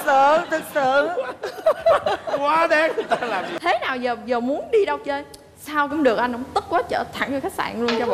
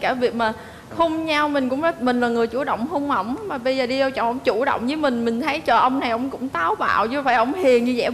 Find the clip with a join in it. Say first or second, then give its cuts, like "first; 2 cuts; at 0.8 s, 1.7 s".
first; 1 cut; at 3.5 s